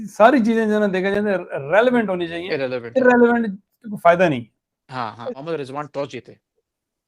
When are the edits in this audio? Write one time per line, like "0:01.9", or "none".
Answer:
0:05.2